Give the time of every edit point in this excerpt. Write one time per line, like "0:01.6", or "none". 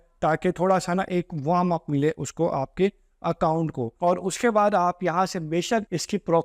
0:03.9